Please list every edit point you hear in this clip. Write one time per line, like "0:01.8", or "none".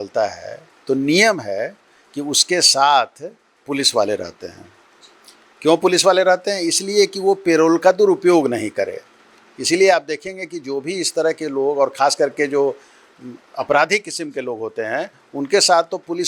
none